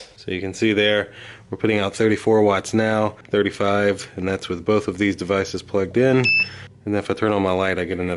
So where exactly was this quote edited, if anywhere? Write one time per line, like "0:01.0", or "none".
none